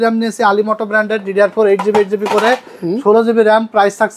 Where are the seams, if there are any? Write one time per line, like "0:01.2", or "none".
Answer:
none